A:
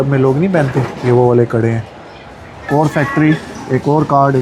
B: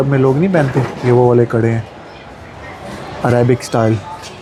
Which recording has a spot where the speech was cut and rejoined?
A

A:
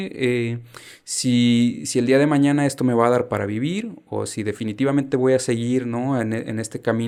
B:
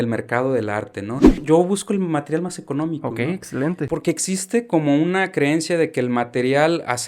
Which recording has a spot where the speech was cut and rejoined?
B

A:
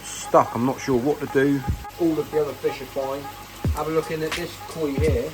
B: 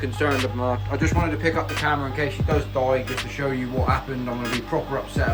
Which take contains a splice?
A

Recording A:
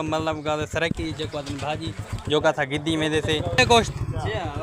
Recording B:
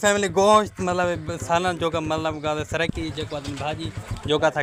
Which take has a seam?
A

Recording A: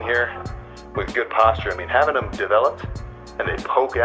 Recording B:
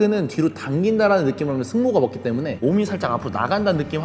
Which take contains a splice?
B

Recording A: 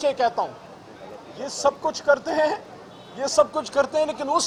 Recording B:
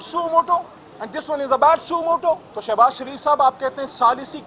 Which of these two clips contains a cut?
B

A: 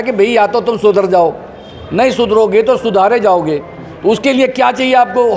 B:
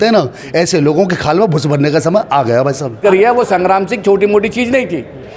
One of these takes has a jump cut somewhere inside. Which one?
B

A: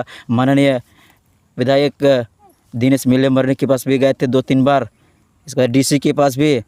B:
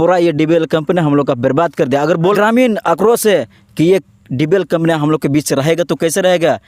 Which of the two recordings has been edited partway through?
B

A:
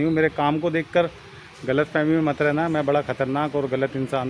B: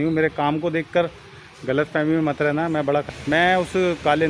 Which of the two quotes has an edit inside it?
B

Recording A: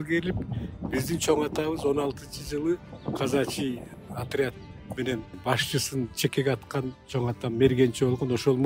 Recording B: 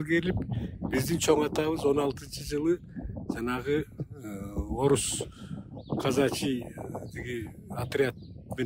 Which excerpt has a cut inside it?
A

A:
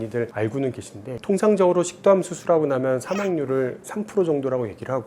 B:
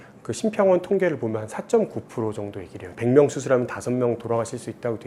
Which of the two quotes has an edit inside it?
A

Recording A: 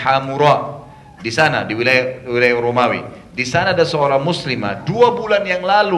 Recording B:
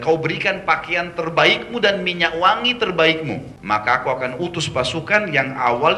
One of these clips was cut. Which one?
B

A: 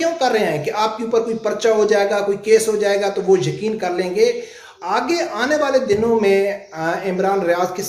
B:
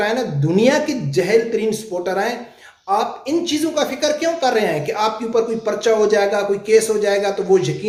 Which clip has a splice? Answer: A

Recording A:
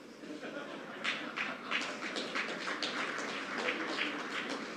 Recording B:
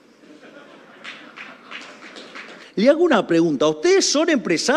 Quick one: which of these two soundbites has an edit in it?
B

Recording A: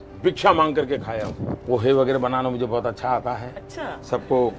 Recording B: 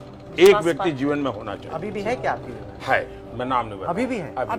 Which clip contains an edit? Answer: A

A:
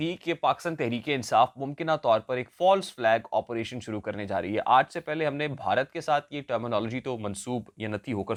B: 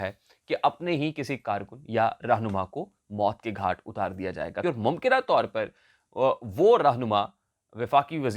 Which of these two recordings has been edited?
B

